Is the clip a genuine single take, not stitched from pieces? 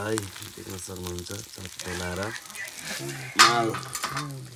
yes; 0 cuts

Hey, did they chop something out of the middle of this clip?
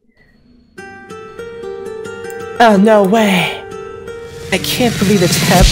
no; 0 cuts

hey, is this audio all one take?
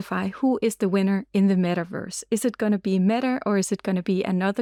yes; 0 cuts

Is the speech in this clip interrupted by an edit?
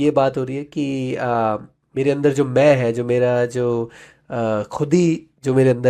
no; 0 cuts

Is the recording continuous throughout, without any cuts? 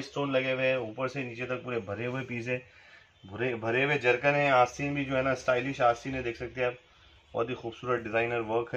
yes; 0 cuts

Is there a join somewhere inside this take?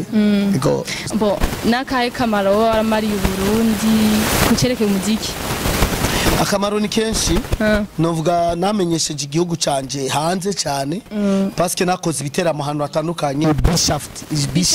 yes; 2 cuts; at 1.0 s, 13.4 s

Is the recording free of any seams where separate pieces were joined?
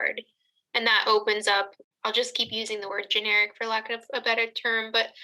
yes; 0 cuts

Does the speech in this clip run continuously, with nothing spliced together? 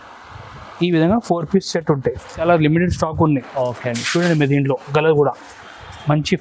no; 1 cut; at 2.4 s

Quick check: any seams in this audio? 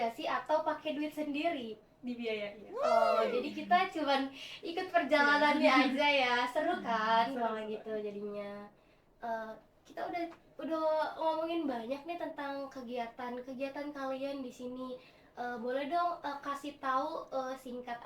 no; 0 cuts

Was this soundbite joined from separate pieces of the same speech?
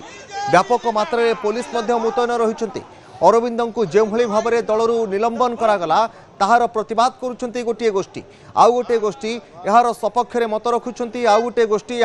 no; 0 cuts

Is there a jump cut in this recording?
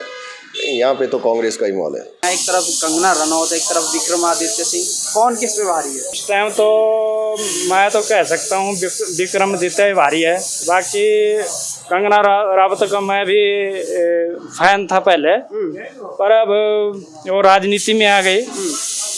yes; 3 cuts; at 2.2 s, 6.1 s, 10.5 s

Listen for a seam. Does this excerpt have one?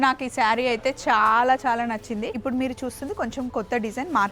yes; 1 cut; at 2.4 s

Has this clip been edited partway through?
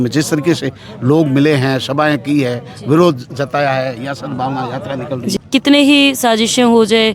yes; 1 cut; at 5.3 s

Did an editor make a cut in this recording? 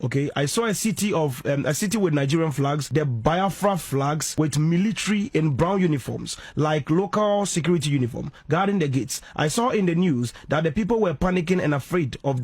yes; 2 cuts; at 2.8 s, 4.2 s

